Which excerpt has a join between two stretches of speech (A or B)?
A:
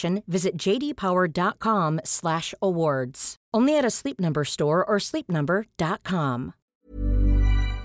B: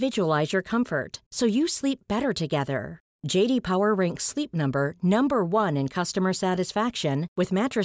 A